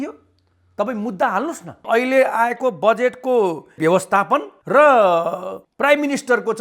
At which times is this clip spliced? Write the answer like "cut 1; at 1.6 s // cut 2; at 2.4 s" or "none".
cut 1; at 1.8 s // cut 2; at 4.5 s